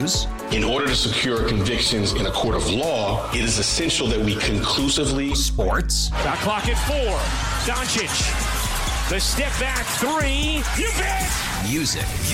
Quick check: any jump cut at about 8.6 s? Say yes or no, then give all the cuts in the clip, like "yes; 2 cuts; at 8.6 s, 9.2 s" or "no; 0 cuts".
no; 0 cuts